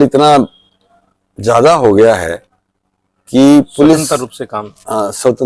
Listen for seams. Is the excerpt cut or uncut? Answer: uncut